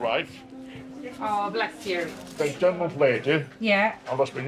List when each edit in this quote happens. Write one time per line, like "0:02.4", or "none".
none